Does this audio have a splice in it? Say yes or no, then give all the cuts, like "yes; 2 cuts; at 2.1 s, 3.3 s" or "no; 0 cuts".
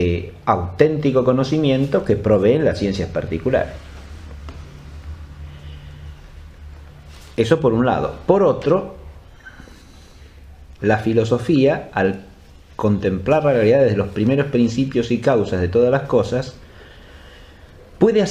no; 0 cuts